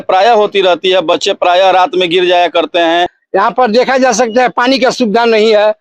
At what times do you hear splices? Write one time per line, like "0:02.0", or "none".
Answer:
0:03.2